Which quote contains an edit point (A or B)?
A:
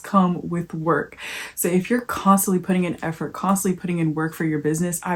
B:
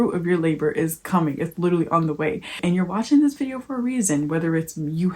B